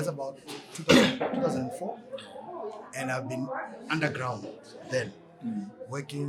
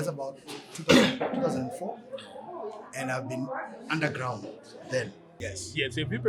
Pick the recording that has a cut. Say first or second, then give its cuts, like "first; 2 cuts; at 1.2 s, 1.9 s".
second; 1 cut; at 5.2 s